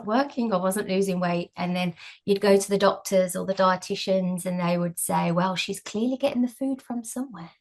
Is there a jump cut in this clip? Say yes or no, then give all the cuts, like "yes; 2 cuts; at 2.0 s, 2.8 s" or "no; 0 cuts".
no; 0 cuts